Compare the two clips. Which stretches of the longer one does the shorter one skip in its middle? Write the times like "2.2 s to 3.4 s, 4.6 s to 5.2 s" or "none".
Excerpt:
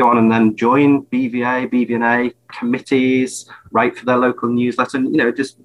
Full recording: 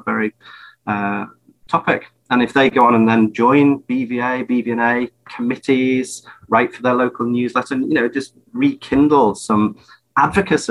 none